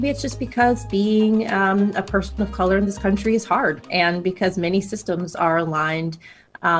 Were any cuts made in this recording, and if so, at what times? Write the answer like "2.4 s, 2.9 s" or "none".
none

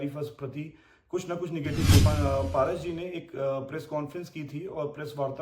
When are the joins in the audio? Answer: 2.0 s

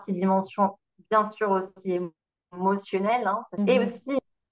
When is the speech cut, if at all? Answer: 3.5 s

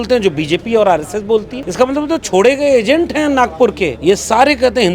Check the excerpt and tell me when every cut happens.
1.6 s, 4.0 s

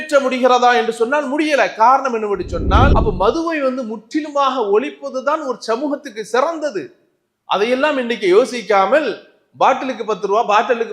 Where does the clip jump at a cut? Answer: 2.9 s

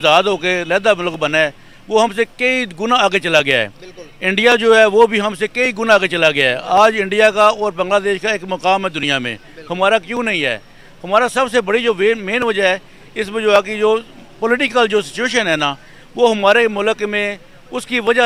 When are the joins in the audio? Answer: none

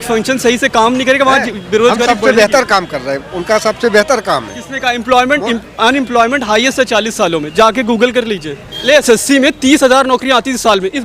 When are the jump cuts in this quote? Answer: 8.8 s

